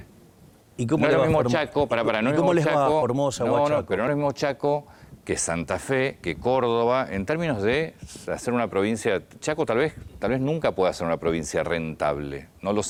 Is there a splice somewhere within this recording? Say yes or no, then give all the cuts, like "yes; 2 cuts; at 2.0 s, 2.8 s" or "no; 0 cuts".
no; 0 cuts